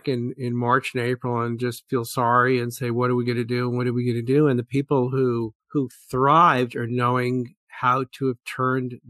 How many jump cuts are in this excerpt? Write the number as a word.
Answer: one